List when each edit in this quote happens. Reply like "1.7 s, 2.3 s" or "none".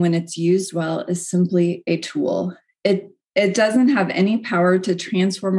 none